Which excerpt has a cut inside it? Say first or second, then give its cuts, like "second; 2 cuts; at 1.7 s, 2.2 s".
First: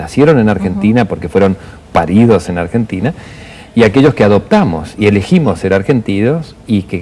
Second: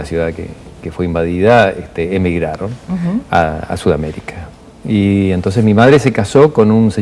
second; 1 cut; at 3.5 s